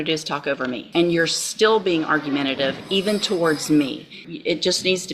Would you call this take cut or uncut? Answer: cut